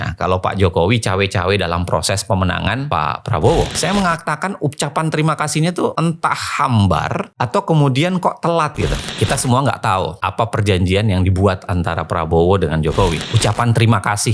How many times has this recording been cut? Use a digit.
3